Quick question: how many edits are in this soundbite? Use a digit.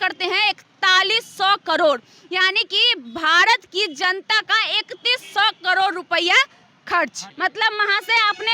1